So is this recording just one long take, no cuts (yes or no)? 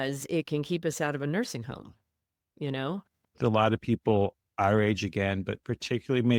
no